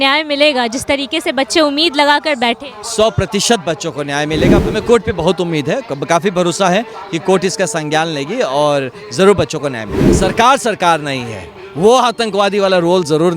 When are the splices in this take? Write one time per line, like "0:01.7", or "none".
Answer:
0:04.6
0:10.1